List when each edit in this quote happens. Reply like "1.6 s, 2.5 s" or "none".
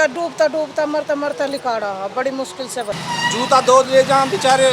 3.0 s